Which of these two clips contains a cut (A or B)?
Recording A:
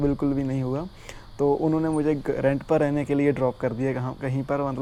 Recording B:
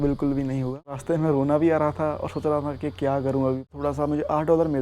B